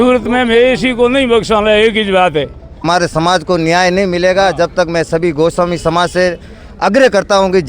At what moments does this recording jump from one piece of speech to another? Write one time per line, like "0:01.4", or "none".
0:02.7